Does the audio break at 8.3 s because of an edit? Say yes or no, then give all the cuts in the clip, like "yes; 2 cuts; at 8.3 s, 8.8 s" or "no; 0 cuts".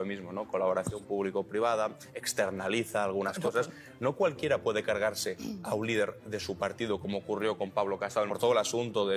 yes; 2 cuts; at 3.8 s, 8.3 s